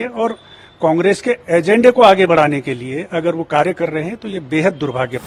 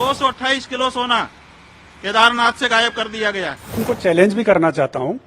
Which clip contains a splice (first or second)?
second